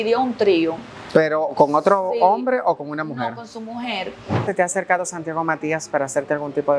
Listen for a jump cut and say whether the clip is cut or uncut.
cut